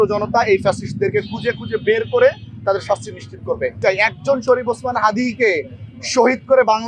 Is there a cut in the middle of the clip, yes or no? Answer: yes